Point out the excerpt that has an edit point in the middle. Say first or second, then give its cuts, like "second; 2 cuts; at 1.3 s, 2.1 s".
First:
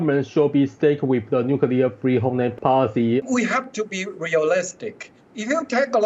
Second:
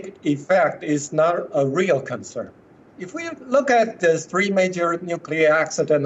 first; 2 cuts; at 2.5 s, 3.2 s